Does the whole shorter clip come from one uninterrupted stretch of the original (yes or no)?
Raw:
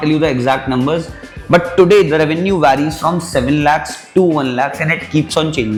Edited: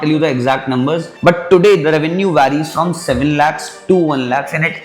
no